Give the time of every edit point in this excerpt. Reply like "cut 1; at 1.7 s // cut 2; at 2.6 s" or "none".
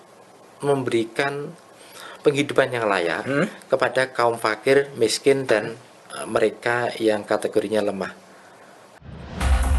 cut 1; at 8.8 s